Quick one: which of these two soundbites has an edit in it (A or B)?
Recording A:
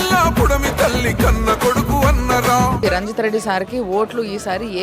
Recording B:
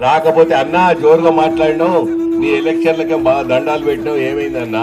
A